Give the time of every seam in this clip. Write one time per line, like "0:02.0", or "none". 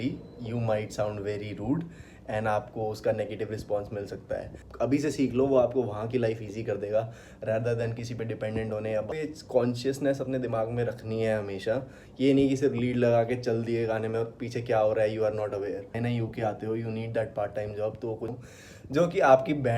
0:04.6
0:09.1
0:15.9
0:18.3